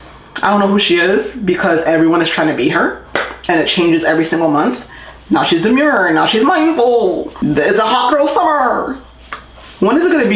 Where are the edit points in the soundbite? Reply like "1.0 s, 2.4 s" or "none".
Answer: 7.3 s